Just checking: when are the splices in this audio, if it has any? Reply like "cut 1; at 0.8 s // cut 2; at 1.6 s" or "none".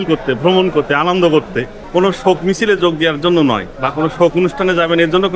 cut 1; at 1.8 s // cut 2; at 3.8 s